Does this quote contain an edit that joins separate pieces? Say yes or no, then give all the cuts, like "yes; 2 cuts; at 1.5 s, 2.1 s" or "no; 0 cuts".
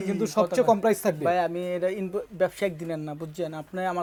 no; 0 cuts